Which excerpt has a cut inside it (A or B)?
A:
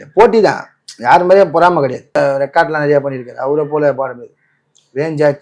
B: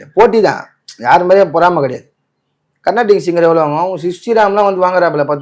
A